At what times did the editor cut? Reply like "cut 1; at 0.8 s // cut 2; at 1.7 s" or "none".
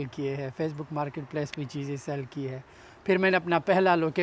none